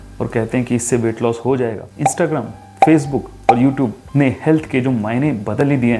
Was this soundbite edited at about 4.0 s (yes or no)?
no